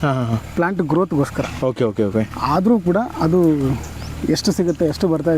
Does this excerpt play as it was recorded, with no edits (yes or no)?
yes